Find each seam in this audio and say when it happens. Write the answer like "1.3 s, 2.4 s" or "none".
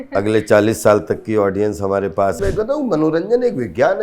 2.4 s